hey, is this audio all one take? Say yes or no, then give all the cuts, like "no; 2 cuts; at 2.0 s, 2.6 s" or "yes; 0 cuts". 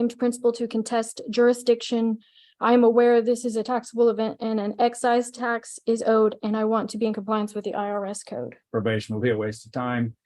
no; 1 cut; at 8.6 s